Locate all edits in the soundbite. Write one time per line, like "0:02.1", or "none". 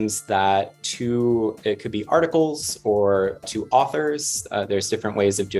0:01.6
0:03.4

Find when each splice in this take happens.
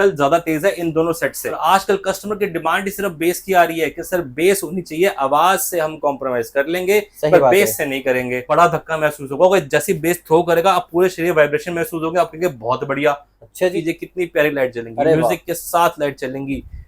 0:01.5
0:08.4
0:13.8

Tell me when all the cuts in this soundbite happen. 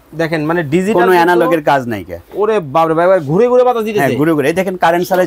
none

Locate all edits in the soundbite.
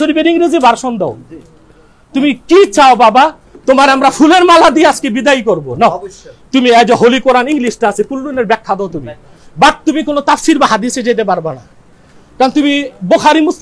none

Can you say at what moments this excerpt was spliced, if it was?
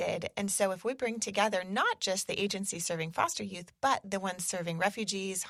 none

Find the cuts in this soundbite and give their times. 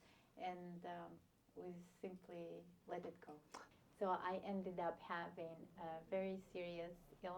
0:03.6

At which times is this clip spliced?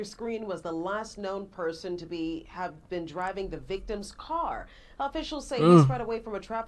none

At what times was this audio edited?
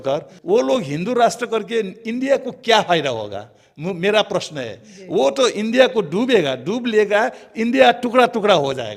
none

